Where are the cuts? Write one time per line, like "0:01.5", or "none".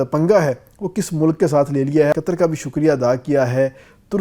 0:02.1